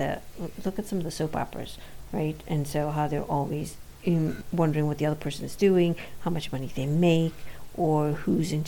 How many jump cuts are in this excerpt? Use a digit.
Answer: 1